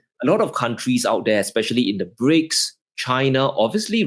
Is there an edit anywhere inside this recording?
no; 0 cuts

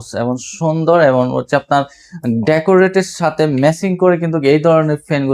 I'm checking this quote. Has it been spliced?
no; 0 cuts

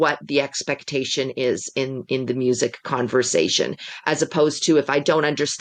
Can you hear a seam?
no; 0 cuts

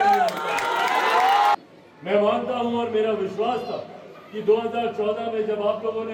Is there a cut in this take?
no; 0 cuts

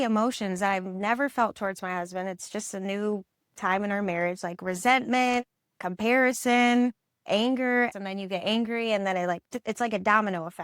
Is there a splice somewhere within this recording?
yes; 2 cuts; at 7.2 s, 7.9 s

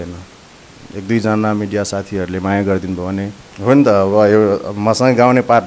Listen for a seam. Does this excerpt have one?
yes; 1 cut; at 3.4 s

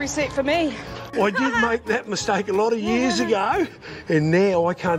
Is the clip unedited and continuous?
no; 1 cut; at 1.1 s

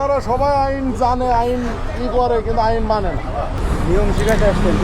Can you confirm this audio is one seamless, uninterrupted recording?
no; 1 cut; at 3.5 s

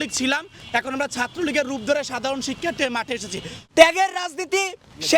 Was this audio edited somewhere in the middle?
yes; 1 cut; at 3.6 s

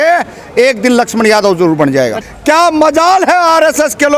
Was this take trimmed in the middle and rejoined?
yes; 1 cut; at 2.2 s

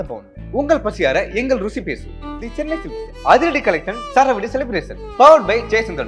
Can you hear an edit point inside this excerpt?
no; 0 cuts

